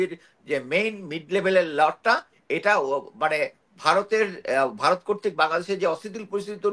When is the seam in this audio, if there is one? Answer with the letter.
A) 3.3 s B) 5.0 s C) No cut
C